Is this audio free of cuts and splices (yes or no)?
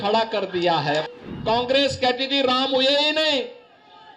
no